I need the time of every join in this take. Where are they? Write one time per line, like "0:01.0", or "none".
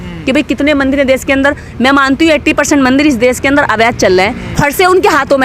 0:04.5

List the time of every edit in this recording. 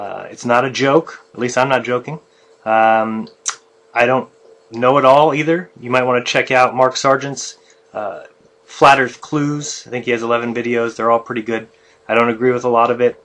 0:04.2

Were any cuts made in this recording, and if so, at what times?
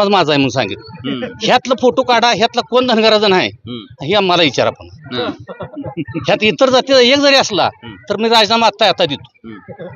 none

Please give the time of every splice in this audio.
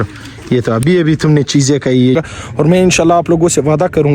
0:02.2

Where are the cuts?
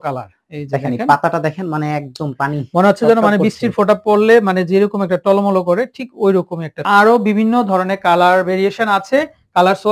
0:06.8

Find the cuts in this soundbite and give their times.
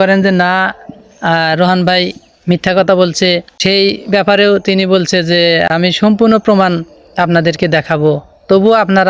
0:03.5
0:05.6

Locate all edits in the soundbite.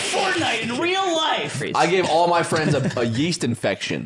0:01.6

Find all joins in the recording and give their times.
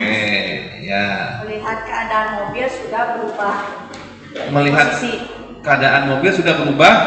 none

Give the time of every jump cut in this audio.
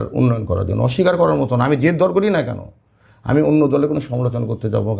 none

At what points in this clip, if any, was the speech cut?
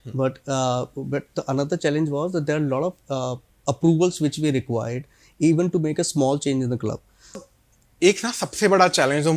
0:07.5

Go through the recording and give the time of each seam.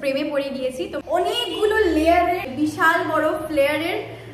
0:01.0
0:02.4

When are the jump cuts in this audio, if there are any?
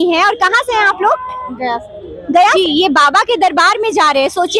0:02.5

